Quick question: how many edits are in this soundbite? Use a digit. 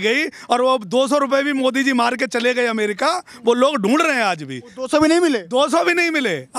0